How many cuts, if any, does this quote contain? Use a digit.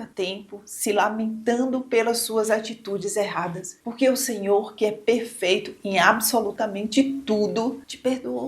1